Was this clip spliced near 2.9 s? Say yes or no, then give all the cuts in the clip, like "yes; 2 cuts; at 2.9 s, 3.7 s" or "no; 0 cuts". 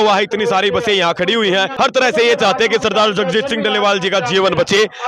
no; 1 cut; at 1.7 s